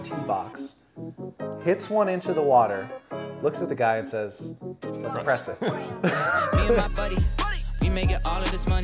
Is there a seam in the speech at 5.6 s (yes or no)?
no